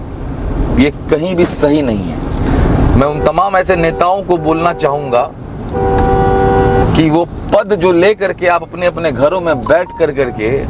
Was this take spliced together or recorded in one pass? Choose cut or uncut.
uncut